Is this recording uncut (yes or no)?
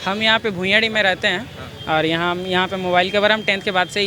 yes